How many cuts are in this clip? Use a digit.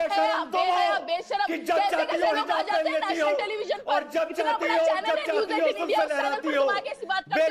0